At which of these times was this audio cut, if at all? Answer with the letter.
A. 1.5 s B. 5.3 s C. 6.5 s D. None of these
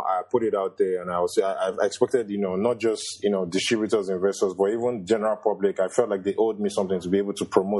D